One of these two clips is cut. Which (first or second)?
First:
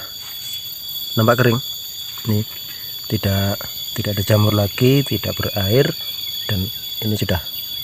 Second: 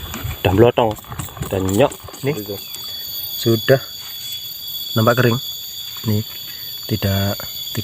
second